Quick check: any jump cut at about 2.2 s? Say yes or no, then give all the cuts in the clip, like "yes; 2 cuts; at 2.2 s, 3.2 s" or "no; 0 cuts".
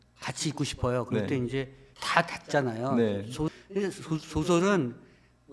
no; 1 cut; at 3.5 s